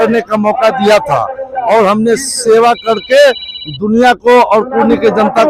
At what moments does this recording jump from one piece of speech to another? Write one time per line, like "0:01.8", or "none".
none